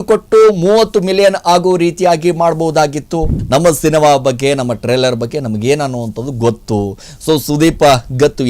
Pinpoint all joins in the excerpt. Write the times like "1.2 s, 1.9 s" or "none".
3.3 s